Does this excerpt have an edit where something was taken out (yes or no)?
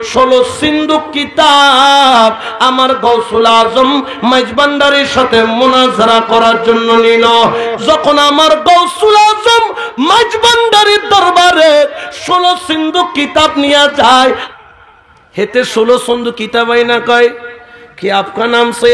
yes